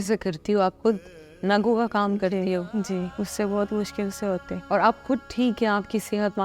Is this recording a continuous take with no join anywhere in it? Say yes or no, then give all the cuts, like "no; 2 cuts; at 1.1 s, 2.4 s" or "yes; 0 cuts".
no; 2 cuts; at 3.1 s, 4.5 s